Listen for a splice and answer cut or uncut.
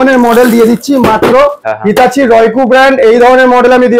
cut